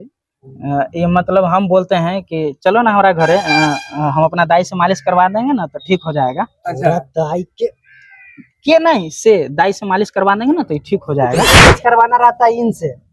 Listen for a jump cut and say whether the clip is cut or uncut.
cut